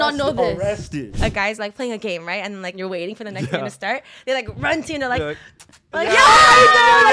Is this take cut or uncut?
cut